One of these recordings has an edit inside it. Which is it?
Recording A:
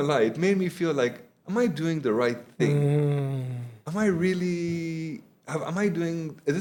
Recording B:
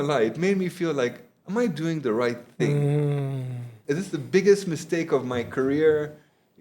B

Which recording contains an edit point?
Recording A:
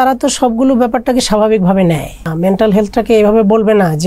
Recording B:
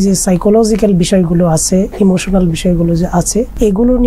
A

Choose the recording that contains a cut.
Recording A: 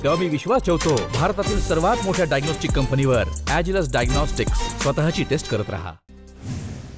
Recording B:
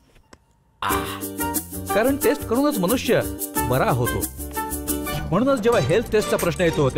A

